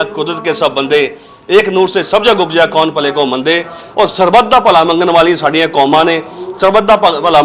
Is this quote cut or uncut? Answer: uncut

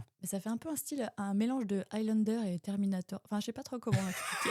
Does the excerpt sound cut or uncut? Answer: uncut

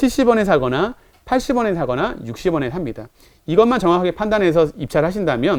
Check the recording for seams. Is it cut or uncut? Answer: uncut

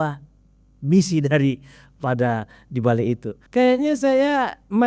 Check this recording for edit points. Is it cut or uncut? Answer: cut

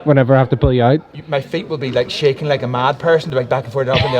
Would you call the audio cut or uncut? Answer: uncut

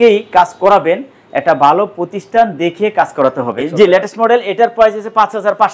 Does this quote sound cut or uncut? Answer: cut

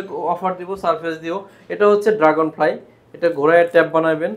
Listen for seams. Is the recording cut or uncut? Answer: uncut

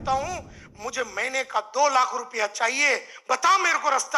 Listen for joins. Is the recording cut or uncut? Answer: uncut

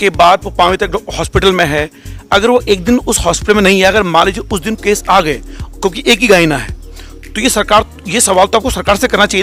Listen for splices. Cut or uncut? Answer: uncut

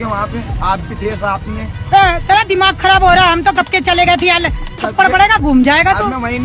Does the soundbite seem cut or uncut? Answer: uncut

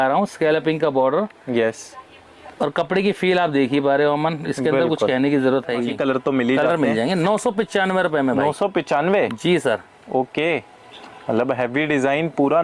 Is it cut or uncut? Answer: cut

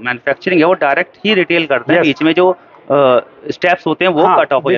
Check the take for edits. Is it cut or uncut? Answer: uncut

